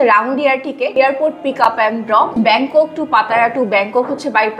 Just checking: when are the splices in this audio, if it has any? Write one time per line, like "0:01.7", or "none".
0:00.9
0:02.3